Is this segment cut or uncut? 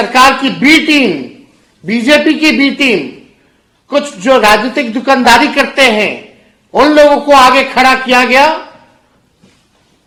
uncut